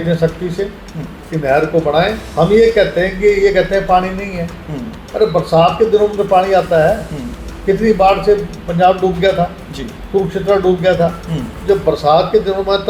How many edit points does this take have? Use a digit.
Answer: 1